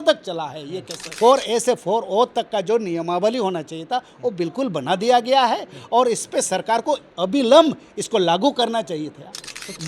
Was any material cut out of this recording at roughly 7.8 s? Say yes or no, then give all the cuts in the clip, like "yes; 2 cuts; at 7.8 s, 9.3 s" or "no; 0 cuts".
no; 1 cut; at 1.1 s